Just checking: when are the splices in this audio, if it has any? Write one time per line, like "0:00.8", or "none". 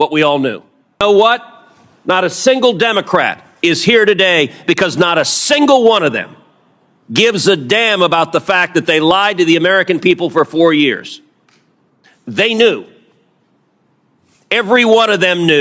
0:01.0

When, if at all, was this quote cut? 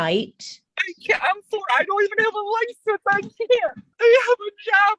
0:03.8

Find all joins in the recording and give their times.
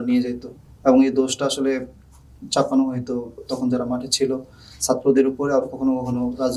none

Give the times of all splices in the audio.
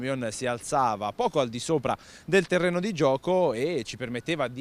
none

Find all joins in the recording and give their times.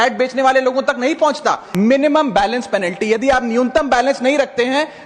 0:01.6

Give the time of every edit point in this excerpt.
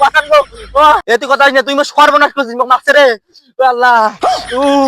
0:01.0

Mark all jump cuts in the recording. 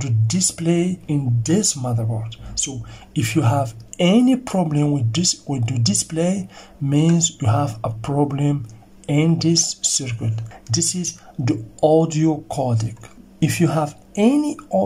0:01.0
0:10.4
0:13.2

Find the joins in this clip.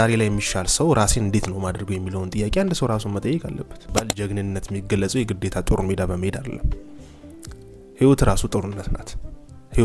0:03.8

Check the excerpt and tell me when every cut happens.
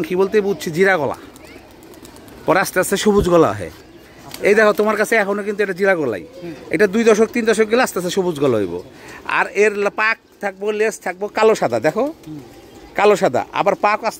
none

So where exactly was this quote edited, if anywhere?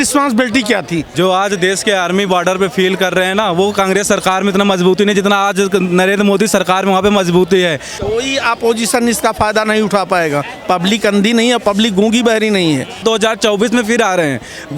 0:01.1
0:08.0
0:13.0

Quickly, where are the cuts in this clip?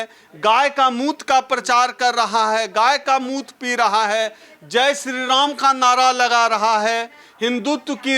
none

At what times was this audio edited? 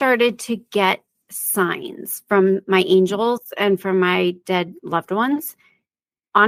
none

